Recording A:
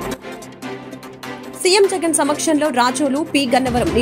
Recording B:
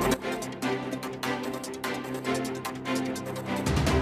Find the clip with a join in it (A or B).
A